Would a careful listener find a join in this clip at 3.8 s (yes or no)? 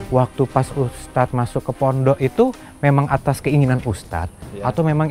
no